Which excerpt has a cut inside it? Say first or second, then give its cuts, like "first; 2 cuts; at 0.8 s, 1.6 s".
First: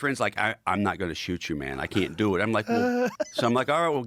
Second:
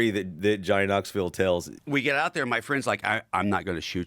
second; 1 cut; at 1.7 s